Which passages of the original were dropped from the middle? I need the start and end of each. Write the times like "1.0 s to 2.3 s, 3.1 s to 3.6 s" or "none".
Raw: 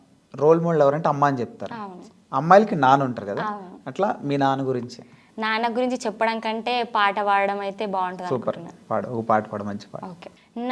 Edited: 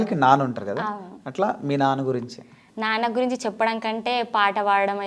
none